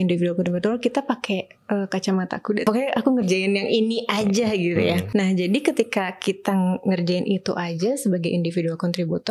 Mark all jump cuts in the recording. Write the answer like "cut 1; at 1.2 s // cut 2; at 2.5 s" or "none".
cut 1; at 2.6 s // cut 2; at 5.0 s